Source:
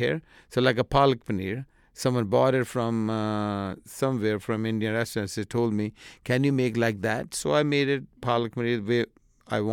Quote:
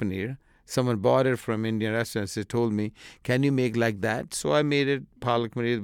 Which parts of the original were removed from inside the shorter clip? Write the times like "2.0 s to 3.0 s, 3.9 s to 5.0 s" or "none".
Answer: 2.7 s to 4.4 s